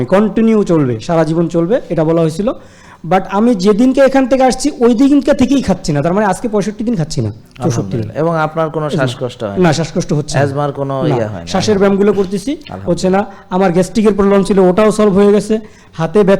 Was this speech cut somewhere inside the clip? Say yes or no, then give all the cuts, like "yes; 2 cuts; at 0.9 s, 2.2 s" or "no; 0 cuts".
no; 0 cuts